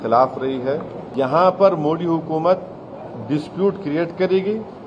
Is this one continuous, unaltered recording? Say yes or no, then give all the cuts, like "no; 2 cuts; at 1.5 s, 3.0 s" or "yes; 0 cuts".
no; 1 cut; at 1.0 s